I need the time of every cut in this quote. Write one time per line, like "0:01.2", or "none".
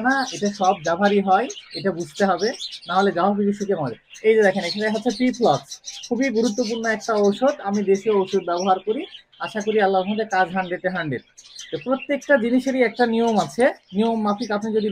none